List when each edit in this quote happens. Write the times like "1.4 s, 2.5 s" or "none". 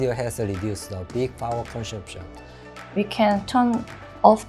2.7 s